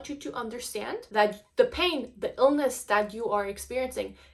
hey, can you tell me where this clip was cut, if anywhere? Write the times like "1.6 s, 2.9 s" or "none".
1.0 s